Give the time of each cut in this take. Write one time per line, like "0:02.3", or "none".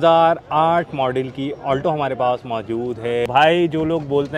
0:03.3